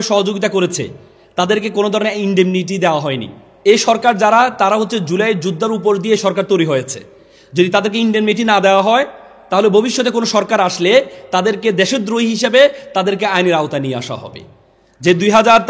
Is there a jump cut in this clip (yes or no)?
yes